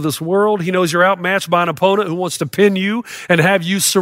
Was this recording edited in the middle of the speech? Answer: no; 0 cuts

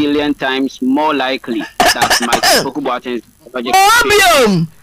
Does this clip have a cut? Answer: no; 0 cuts

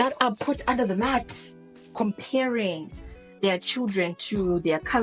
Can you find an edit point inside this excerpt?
yes; 1 cut; at 1.8 s

